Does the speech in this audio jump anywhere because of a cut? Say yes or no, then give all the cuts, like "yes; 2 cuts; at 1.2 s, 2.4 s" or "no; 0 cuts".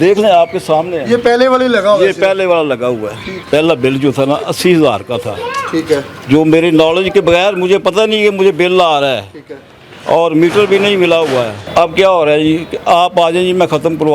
no; 0 cuts